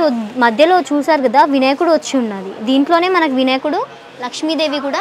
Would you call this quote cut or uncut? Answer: uncut